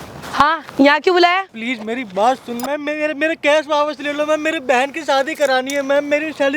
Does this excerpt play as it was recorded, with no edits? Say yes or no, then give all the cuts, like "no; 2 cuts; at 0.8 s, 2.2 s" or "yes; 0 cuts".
no; 2 cuts; at 1.5 s, 2.6 s